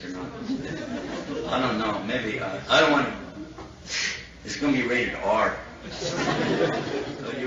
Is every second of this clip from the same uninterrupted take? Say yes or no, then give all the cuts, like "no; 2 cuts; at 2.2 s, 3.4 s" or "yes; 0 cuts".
yes; 0 cuts